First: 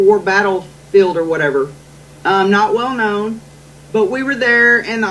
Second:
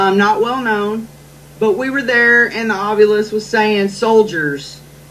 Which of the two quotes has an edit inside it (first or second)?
second